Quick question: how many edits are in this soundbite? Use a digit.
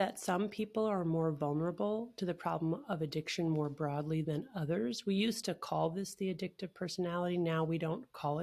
0